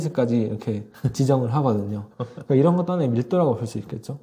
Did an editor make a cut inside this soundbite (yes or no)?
no